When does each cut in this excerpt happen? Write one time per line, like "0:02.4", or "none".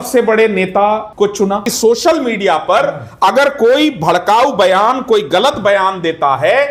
0:01.5